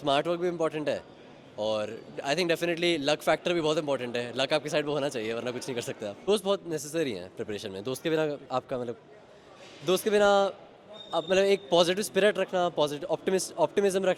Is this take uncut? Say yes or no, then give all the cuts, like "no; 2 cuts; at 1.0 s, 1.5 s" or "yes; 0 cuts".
no; 1 cut; at 6.3 s